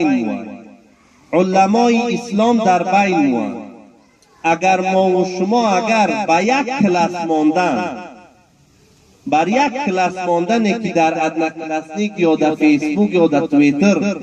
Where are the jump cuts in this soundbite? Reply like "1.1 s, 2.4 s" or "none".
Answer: none